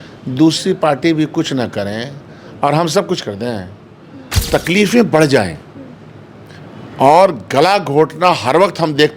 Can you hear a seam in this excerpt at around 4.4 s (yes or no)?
yes